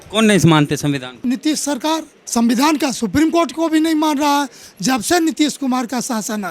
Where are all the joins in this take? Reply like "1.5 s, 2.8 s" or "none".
1.2 s, 2.2 s, 4.6 s